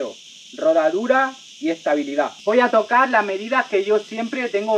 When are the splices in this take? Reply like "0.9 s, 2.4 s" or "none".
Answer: none